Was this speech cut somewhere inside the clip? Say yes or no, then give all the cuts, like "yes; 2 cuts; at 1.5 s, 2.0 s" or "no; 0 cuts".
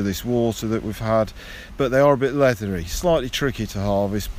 yes; 1 cut; at 1.7 s